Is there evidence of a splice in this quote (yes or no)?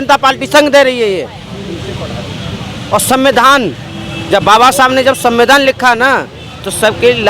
no